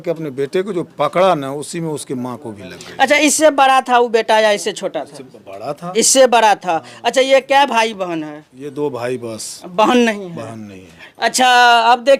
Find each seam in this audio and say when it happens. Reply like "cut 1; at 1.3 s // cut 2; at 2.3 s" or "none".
none